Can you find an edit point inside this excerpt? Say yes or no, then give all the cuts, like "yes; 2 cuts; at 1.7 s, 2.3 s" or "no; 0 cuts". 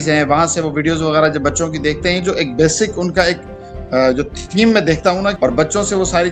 yes; 1 cut; at 5.4 s